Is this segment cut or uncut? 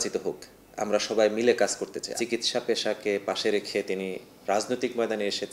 cut